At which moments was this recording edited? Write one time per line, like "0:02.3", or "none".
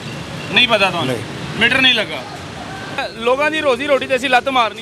0:03.0

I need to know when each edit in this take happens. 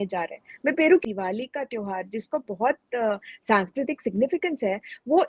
0:01.0

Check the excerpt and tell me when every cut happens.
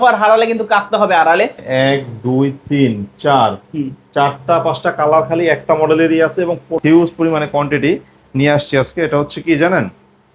0:01.6
0:06.7

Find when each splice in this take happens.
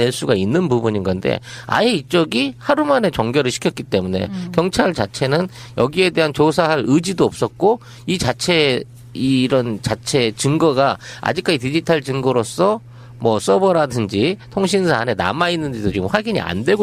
0:09.5

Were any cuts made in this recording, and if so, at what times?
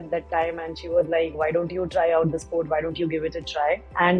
none

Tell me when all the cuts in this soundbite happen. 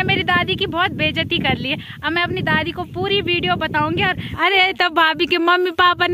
0:04.3

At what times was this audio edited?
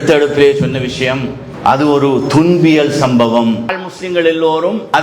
0:03.7

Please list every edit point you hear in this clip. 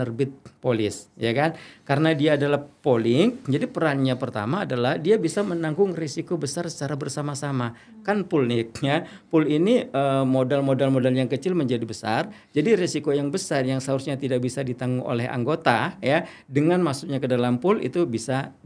none

